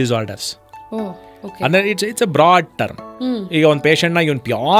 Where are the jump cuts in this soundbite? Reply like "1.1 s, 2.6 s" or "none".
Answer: none